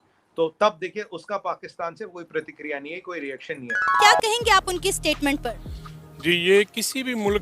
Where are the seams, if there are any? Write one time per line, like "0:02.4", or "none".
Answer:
0:03.9